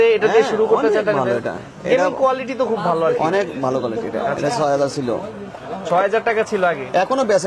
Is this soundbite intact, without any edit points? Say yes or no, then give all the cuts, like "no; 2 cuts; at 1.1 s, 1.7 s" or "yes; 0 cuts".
yes; 0 cuts